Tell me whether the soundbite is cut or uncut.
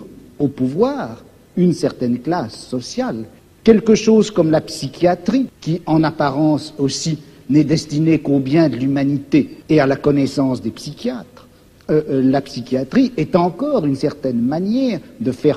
cut